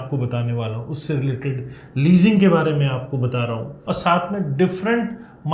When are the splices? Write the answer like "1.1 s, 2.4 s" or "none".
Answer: 3.7 s